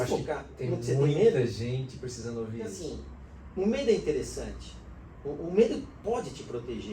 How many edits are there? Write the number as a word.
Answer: one